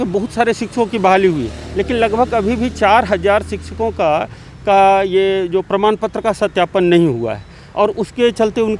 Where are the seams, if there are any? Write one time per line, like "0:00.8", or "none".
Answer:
none